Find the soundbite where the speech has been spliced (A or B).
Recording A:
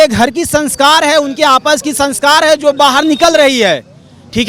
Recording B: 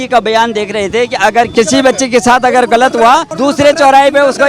B